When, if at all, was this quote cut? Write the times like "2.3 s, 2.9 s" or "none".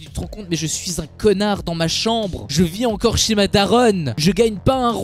none